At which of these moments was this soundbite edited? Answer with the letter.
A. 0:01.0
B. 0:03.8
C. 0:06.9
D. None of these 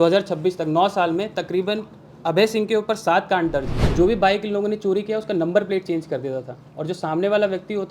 B